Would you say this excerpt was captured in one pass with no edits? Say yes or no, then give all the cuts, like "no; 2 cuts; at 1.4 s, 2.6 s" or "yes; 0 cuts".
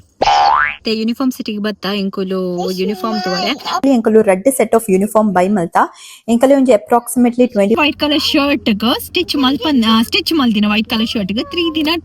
no; 2 cuts; at 3.8 s, 7.8 s